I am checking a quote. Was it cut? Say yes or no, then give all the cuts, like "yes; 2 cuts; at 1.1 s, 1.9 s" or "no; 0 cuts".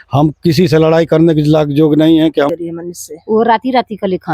yes; 1 cut; at 2.5 s